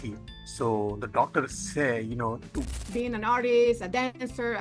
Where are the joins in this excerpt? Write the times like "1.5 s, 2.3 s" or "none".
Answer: 2.9 s